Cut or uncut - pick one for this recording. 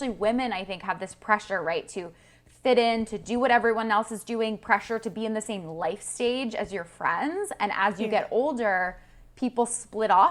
uncut